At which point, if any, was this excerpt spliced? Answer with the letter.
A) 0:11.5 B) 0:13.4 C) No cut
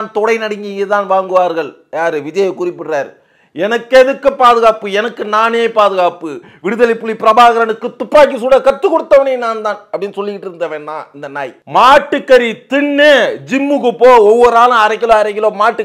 A